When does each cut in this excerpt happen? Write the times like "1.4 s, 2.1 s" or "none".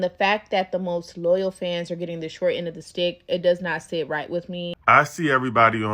4.8 s